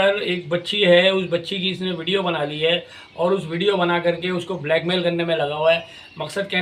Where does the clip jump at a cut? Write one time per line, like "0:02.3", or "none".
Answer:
none